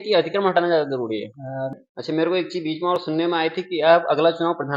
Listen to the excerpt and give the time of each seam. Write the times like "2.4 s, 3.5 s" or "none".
1.7 s